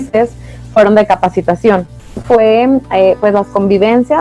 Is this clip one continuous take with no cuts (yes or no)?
no